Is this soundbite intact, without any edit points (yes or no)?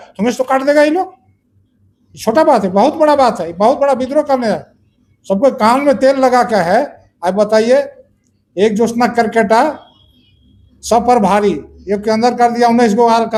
yes